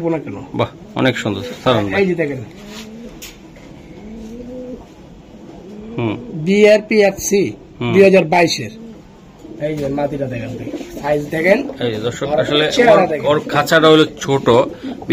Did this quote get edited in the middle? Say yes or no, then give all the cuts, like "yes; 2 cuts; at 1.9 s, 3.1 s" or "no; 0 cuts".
no; 0 cuts